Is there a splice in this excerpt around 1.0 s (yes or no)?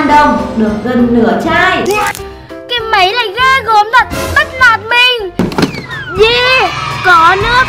no